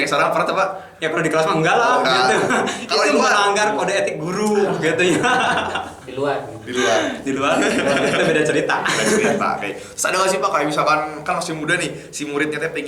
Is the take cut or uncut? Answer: uncut